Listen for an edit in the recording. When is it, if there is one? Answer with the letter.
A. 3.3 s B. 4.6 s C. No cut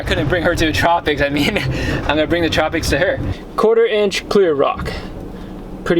A